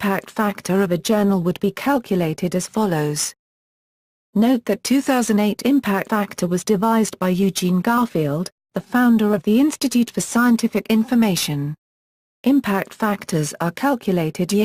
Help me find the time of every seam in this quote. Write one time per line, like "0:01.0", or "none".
none